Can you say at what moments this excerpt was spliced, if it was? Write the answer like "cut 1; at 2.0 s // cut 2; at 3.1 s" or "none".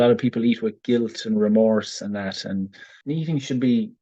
cut 1; at 2.9 s

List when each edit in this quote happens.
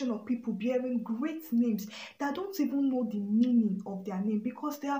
none

